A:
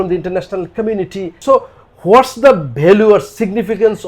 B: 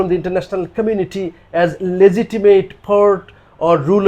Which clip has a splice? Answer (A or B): A